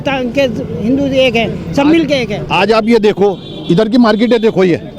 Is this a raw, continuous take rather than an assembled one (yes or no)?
yes